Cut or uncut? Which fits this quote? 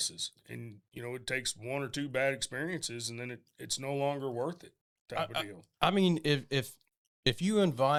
uncut